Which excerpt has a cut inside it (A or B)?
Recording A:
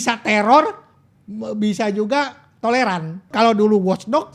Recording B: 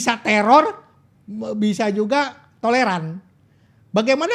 A